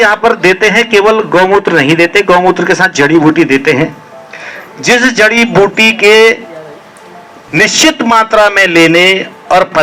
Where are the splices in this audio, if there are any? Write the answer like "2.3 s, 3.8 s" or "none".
none